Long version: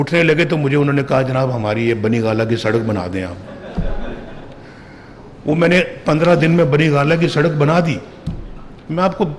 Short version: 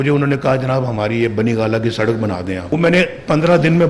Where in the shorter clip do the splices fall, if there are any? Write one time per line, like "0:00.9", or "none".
0:02.7